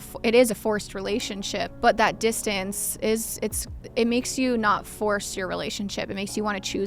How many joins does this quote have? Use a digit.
1